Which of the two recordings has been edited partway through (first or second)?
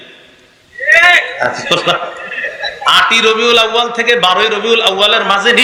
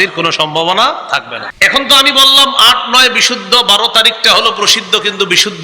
second